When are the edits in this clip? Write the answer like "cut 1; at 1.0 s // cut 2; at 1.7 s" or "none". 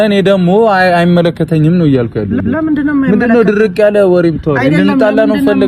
none

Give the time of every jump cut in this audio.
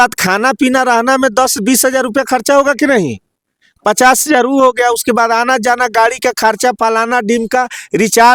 none

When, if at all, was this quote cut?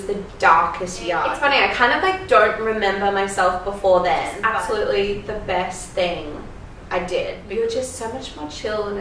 cut 1; at 1.3 s // cut 2; at 4.4 s // cut 3; at 7.4 s

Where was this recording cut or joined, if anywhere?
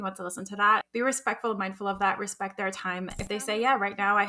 cut 1; at 0.9 s // cut 2; at 3.2 s

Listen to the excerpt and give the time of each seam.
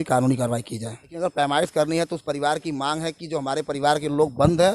cut 1; at 1.1 s

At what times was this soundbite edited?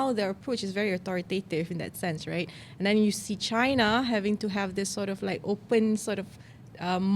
none

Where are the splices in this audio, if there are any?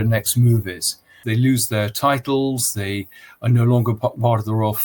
cut 1; at 1.2 s

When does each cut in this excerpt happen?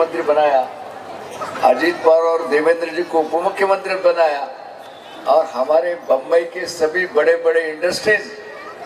none

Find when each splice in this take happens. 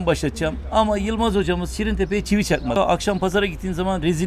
cut 1; at 2.8 s

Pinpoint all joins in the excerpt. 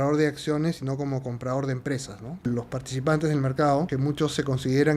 cut 1; at 2.5 s // cut 2; at 3.9 s

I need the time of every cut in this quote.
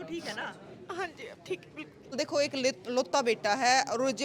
cut 1; at 2.1 s

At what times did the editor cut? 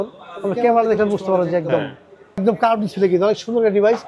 cut 1; at 2.4 s

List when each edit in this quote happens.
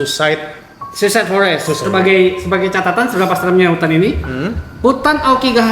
cut 1; at 1.8 s

